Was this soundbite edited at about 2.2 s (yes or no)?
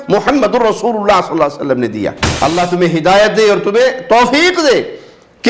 yes